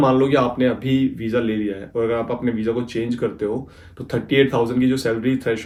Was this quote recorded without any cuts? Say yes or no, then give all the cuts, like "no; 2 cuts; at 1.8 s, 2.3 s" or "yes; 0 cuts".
yes; 0 cuts